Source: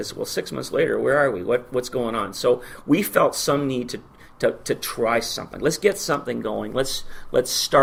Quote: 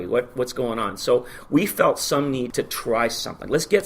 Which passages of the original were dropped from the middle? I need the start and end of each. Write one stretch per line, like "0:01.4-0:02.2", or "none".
0:03.8-0:04.6